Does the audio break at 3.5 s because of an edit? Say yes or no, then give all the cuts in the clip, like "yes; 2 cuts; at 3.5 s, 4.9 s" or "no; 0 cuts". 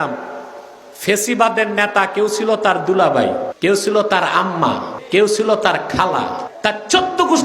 yes; 3 cuts; at 3.5 s, 4.9 s, 6.5 s